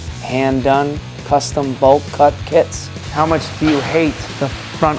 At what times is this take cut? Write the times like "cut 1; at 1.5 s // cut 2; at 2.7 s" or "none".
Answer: cut 1; at 3.0 s

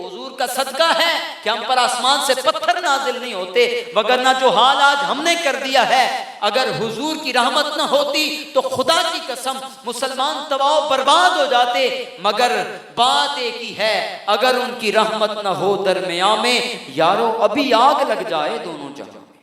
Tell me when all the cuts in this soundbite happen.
none

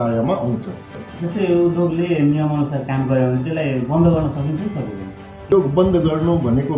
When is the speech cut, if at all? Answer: cut 1; at 0.8 s // cut 2; at 5.5 s

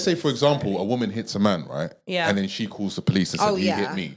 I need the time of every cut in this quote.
none

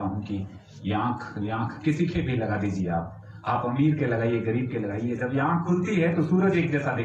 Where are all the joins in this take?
none

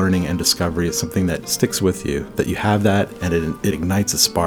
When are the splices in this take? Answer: cut 1; at 1.5 s // cut 2; at 3.7 s

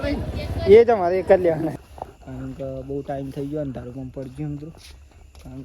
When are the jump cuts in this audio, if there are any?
cut 1; at 1.7 s

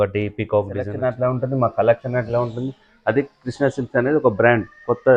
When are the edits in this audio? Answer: cut 1; at 0.9 s

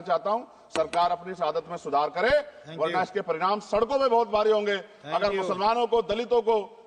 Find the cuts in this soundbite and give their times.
none

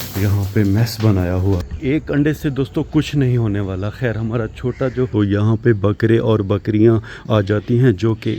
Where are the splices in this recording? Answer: cut 1; at 1.7 s // cut 2; at 5.1 s

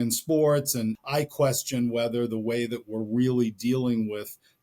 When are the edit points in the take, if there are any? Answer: cut 1; at 1.0 s

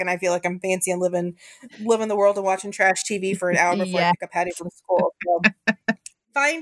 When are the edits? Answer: none

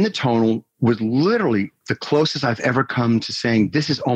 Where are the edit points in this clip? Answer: none

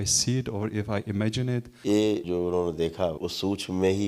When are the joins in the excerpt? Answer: cut 1; at 1.7 s // cut 2; at 2.2 s // cut 3; at 3.2 s

